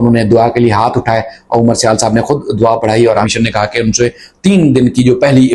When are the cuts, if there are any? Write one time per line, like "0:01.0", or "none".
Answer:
0:03.3